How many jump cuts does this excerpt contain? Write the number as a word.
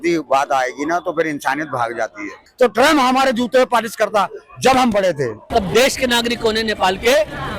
two